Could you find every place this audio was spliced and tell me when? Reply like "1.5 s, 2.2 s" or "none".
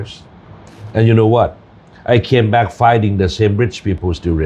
none